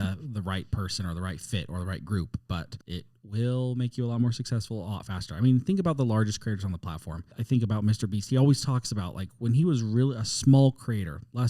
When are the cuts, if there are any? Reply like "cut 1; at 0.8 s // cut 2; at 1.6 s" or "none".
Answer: cut 1; at 7.3 s